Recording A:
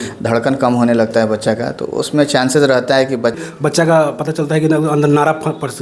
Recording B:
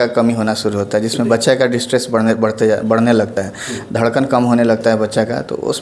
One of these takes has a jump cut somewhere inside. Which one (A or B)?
A